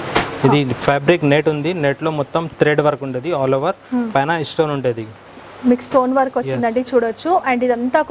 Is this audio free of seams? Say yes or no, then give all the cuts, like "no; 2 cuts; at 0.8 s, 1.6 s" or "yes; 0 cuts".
yes; 0 cuts